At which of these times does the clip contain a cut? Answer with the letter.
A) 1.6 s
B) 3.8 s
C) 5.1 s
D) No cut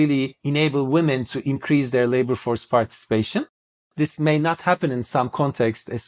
B